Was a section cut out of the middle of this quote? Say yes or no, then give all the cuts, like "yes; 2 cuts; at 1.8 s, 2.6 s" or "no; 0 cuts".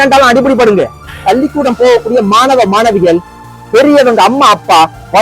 yes; 1 cut; at 1.1 s